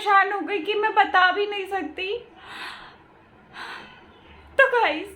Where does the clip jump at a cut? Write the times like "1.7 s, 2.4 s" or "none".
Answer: none

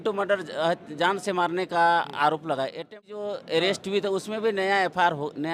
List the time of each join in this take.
3.1 s

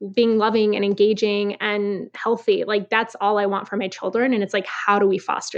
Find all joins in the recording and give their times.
none

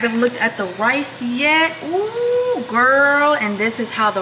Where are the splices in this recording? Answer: none

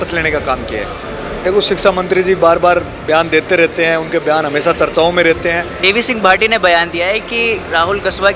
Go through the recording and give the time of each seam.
1.0 s, 5.7 s

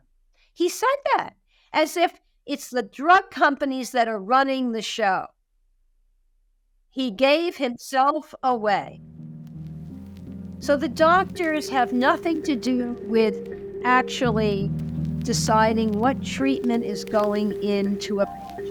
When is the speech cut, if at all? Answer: none

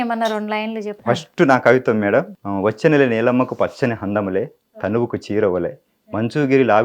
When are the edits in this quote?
0.9 s, 2.4 s

